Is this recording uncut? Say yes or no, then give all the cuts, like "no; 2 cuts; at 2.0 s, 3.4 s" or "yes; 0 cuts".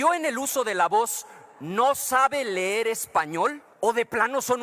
no; 1 cut; at 3.7 s